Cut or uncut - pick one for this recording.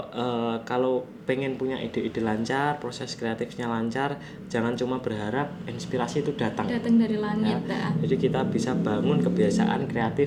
uncut